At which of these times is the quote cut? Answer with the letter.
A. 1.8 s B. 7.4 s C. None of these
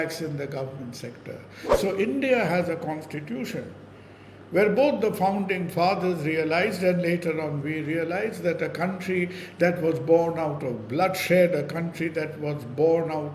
A